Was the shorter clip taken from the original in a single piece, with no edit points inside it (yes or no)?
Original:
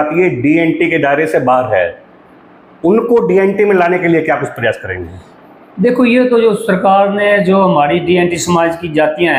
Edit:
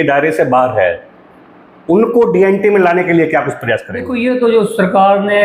no